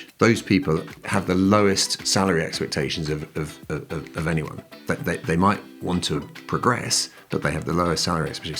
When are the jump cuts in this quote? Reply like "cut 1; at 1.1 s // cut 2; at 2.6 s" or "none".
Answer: cut 1; at 1.0 s

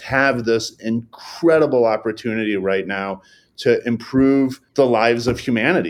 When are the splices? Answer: cut 1; at 4.6 s

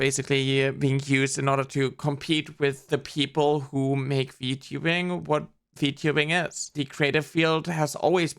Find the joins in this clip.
cut 1; at 6.6 s

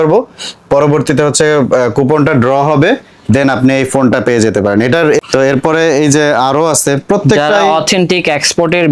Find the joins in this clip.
cut 1; at 5.3 s

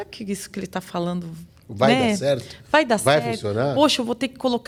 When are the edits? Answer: none

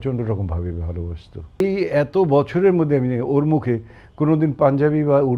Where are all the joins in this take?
cut 1; at 1.6 s

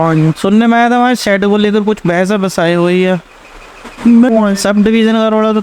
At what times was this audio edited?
cut 1; at 4.3 s

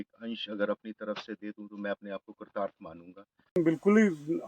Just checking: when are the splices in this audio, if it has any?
cut 1; at 3.6 s

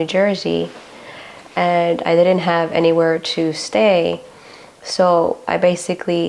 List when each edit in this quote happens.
none

